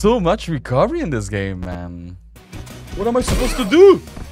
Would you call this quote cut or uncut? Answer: cut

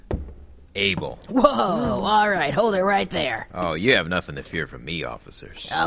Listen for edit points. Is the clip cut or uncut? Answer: uncut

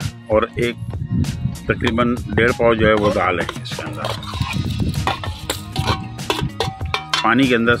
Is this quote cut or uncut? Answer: uncut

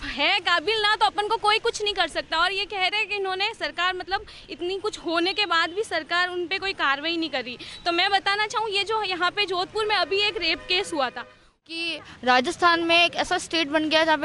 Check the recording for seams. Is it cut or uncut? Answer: cut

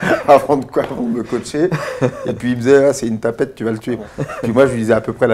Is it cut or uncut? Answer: cut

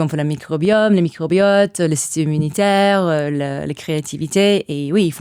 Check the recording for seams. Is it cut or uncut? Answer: uncut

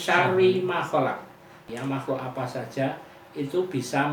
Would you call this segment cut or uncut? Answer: cut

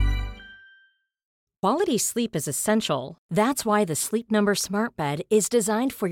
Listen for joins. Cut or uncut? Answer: cut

